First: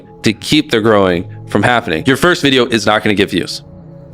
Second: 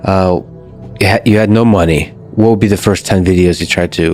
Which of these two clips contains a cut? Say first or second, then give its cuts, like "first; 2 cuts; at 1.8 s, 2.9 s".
first; 1 cut; at 2.0 s